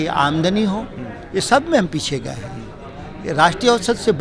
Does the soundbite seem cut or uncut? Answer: uncut